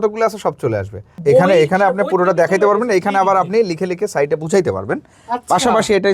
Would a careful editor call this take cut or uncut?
cut